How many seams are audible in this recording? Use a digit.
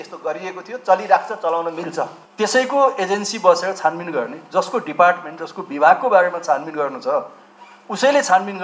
1